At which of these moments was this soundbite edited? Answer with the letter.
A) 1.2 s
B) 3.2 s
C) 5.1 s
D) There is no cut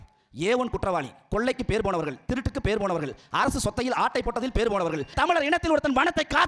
C